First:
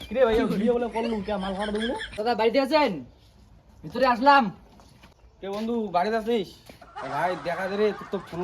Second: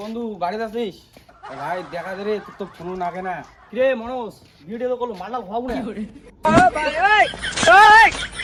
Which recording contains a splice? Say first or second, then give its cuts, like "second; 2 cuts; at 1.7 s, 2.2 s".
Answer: first; 1 cut; at 2.1 s